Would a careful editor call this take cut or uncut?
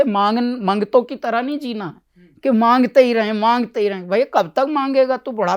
uncut